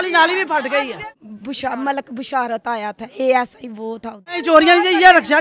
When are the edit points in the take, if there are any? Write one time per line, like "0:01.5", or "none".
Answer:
0:01.0
0:04.3